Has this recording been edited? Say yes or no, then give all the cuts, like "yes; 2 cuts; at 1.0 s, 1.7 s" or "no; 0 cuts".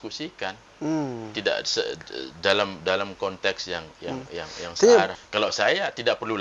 yes; 1 cut; at 5.2 s